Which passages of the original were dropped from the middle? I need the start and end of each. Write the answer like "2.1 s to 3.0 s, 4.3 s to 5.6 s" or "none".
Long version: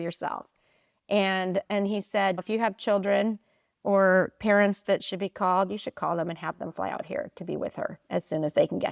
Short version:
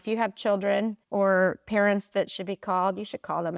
3.4 s to 3.7 s